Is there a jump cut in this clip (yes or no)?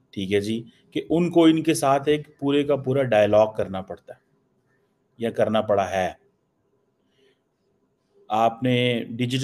no